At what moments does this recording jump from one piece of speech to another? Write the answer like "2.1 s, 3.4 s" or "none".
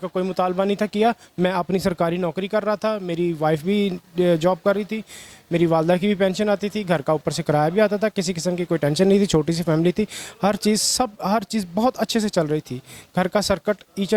none